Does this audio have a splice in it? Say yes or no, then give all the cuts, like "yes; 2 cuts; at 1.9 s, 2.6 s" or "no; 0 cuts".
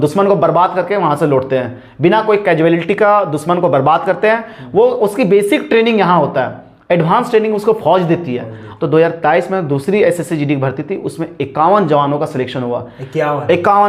yes; 1 cut; at 8.6 s